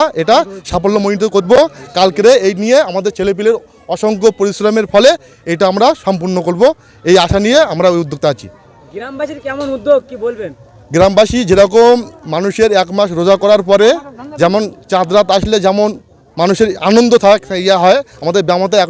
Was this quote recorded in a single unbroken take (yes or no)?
yes